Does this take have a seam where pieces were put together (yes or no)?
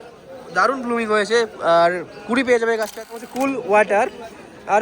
yes